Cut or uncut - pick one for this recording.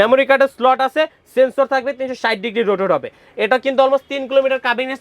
uncut